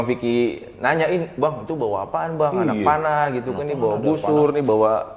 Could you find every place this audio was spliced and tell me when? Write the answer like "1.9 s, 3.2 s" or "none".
none